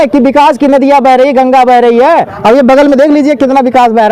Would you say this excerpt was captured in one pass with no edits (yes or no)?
yes